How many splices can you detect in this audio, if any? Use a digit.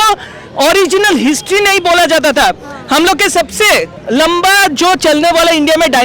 1